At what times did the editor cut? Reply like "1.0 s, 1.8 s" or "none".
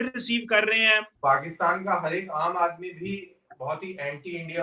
1.1 s